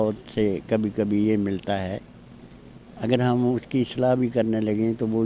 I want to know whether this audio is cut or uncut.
uncut